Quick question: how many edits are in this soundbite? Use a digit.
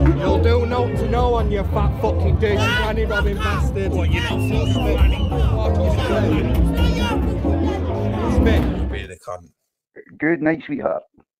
1